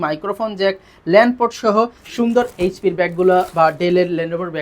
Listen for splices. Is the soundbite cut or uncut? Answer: cut